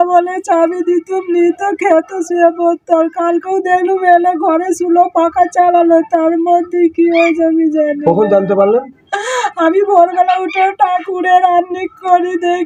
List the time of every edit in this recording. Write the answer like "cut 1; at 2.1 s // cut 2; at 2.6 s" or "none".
none